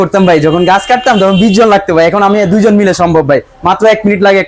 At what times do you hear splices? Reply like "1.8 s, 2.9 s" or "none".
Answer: none